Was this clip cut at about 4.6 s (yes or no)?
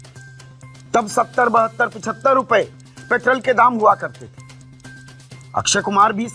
no